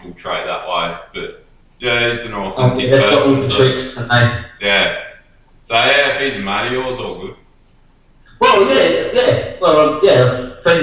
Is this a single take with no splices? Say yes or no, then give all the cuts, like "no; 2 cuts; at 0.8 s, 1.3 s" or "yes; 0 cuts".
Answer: yes; 0 cuts